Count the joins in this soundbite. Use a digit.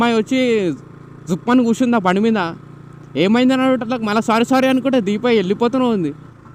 0